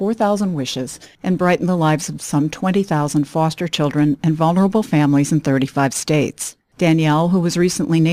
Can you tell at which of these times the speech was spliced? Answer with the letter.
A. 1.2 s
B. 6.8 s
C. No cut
A